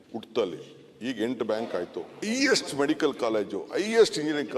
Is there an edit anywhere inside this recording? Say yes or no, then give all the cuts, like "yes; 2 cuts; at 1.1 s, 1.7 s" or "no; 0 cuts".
yes; 1 cut; at 2.1 s